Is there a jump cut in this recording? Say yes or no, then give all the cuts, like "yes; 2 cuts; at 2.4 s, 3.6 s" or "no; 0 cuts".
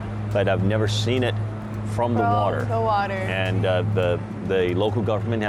no; 0 cuts